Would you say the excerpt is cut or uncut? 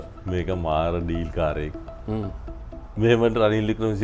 uncut